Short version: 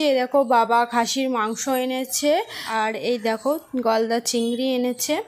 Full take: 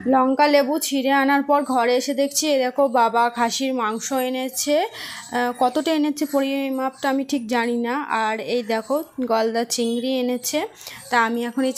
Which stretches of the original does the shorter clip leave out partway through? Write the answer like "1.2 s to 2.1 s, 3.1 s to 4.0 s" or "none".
5.1 s to 8.1 s

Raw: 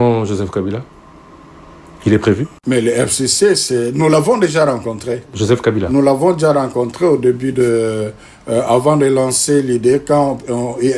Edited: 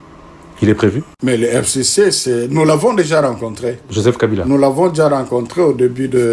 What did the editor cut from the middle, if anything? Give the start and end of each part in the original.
none

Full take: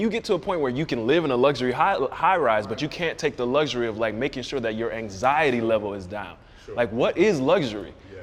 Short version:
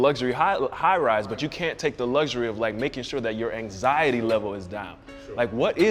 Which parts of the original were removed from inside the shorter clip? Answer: none

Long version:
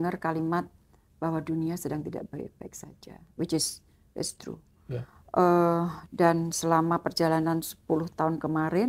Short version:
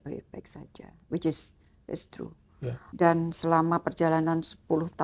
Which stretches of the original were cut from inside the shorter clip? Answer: 5.1 s to 6.0 s

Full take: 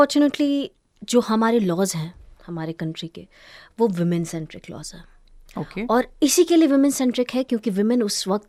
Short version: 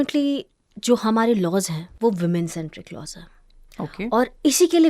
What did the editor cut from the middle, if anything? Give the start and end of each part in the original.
2.1 s to 3.6 s

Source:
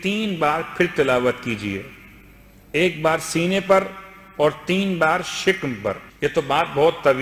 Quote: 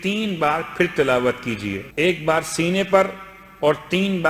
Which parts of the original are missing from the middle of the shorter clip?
1.8 s to 2.6 s

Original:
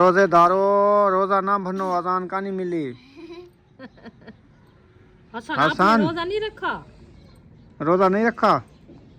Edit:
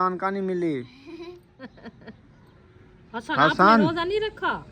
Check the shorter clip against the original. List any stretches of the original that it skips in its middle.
3.6 s to 3.7 s

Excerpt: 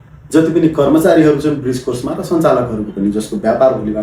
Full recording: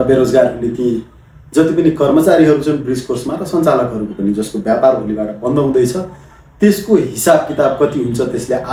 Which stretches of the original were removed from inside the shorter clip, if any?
none

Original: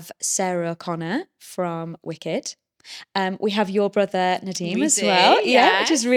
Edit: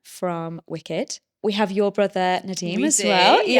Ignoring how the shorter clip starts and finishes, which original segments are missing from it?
2.7 s to 3.4 s

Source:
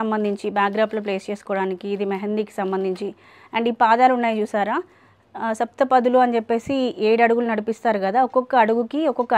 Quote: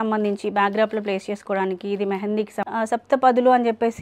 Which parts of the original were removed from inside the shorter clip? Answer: 2.6 s to 5.3 s

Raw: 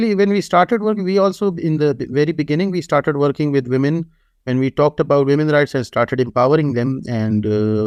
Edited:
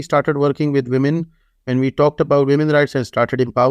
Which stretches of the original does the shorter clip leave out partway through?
none

